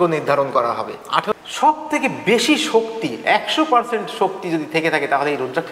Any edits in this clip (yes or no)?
yes